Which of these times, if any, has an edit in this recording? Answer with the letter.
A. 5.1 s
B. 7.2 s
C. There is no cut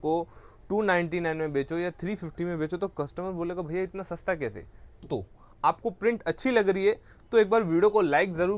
A